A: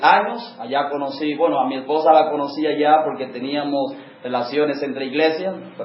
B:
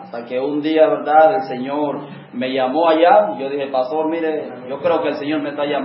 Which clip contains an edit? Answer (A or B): B